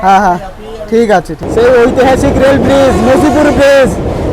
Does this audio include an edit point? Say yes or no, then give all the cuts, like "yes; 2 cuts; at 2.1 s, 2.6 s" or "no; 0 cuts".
yes; 1 cut; at 1.4 s